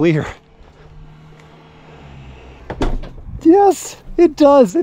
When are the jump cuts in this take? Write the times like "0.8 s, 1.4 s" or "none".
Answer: 2.6 s

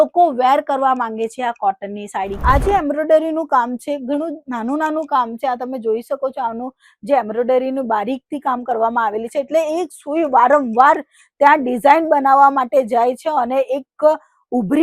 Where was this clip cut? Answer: 2.3 s

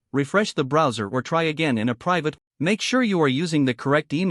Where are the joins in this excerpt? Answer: 2.4 s

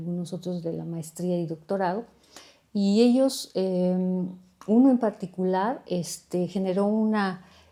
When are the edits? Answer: none

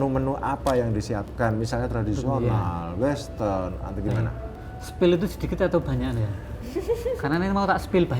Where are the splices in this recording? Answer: none

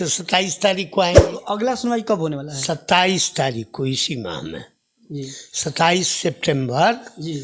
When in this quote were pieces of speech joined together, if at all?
1.3 s

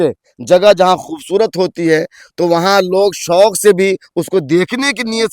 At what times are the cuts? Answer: none

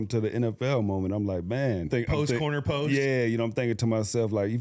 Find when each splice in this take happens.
2.0 s

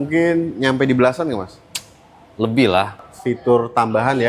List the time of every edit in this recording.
3.1 s

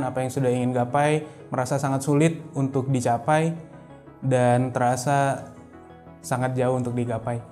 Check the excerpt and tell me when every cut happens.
none

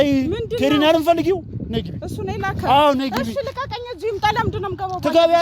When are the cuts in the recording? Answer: none

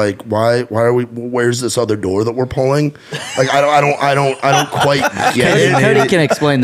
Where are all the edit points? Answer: none

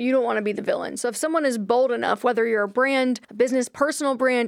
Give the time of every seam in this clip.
3.3 s

